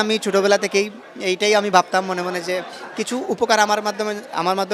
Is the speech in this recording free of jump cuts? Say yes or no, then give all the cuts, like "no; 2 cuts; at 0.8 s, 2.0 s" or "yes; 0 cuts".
yes; 0 cuts